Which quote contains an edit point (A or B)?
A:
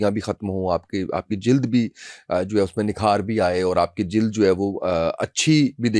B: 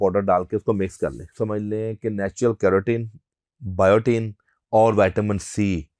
B